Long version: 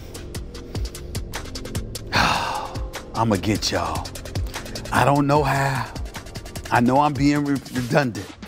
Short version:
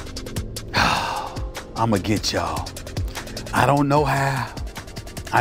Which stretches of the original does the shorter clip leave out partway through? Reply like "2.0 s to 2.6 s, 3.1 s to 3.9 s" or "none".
none